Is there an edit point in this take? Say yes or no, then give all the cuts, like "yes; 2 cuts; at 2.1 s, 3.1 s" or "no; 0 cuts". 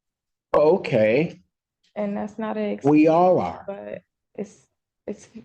yes; 1 cut; at 4.2 s